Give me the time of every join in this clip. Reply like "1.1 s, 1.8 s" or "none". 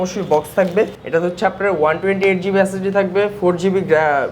1.0 s